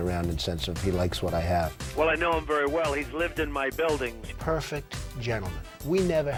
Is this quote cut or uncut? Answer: uncut